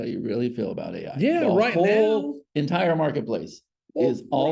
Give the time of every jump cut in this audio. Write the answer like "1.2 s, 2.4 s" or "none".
none